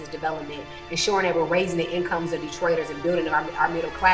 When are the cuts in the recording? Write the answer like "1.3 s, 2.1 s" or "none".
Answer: none